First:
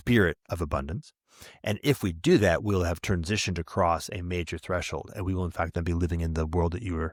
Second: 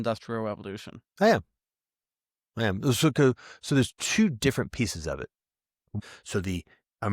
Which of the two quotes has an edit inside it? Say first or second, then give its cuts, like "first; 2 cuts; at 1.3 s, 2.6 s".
second; 1 cut; at 5.9 s